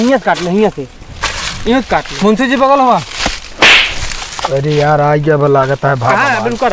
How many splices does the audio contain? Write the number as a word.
zero